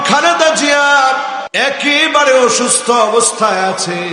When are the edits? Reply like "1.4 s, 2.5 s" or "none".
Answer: 1.5 s